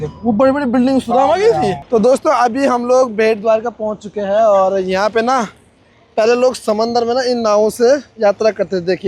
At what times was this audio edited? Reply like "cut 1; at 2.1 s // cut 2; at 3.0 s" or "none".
cut 1; at 1.7 s